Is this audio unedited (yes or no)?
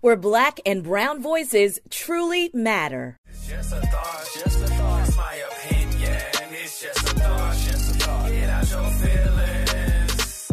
no